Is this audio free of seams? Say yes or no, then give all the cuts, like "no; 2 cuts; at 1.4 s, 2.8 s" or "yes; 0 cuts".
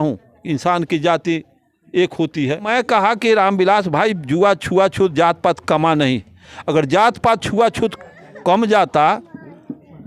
no; 1 cut; at 2.7 s